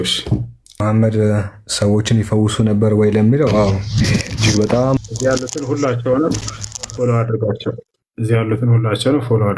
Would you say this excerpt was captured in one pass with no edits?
no; 2 cuts; at 0.8 s, 5.0 s

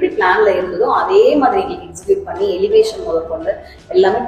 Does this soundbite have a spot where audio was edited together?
no; 0 cuts

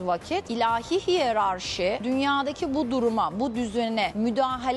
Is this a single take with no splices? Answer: yes; 0 cuts

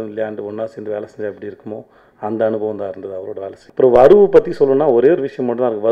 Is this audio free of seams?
no; 1 cut; at 3.6 s

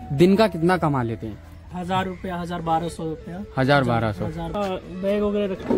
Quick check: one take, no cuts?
no; 2 cuts; at 1.8 s, 4.4 s

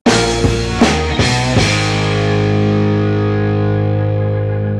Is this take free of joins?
yes; 0 cuts

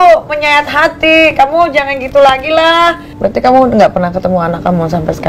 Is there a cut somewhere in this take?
yes; 1 cut; at 3.2 s

